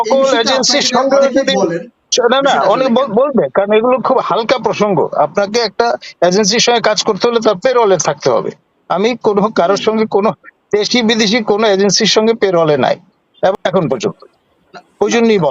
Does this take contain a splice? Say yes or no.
yes